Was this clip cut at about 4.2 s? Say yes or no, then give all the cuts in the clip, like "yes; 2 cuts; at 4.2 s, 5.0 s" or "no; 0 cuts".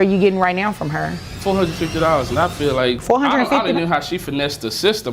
no; 2 cuts; at 1.2 s, 3.0 s